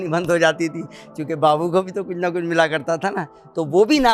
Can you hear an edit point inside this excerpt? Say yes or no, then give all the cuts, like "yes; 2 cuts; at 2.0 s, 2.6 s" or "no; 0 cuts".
no; 0 cuts